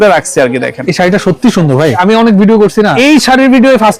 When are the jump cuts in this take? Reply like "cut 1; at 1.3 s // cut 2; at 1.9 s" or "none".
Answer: cut 1; at 2.0 s // cut 2; at 2.9 s